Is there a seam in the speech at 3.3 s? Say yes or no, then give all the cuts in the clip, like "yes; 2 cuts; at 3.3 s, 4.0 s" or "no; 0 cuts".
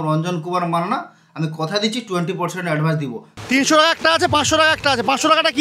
yes; 1 cut; at 3.3 s